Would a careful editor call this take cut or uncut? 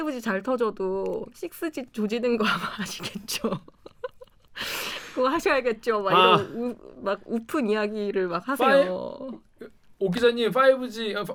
uncut